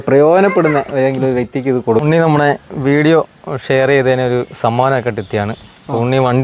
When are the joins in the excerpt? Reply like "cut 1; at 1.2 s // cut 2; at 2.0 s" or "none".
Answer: cut 1; at 2.0 s